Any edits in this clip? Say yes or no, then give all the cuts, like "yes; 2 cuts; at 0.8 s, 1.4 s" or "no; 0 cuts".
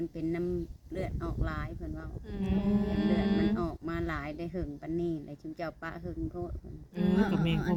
no; 0 cuts